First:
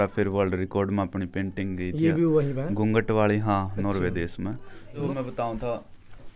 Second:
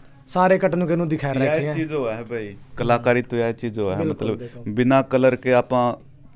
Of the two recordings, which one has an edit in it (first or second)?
first